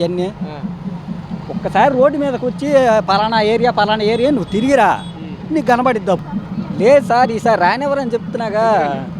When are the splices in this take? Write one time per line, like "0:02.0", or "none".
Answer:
0:06.3